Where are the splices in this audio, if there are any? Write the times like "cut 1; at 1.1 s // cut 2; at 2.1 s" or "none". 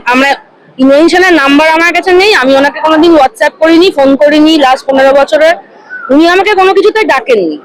none